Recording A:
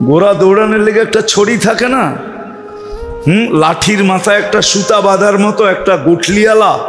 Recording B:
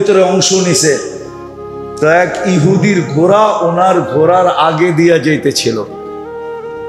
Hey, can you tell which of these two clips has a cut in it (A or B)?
B